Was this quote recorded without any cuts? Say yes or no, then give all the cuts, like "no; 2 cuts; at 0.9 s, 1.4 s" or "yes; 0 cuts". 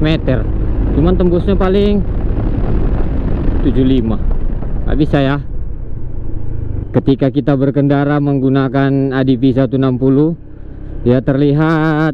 no; 1 cut; at 6.9 s